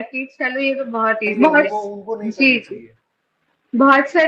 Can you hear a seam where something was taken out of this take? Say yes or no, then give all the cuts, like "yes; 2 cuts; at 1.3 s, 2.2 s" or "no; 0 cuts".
yes; 1 cut; at 1.3 s